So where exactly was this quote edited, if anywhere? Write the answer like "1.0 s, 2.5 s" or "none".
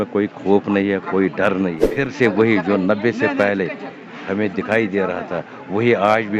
1.8 s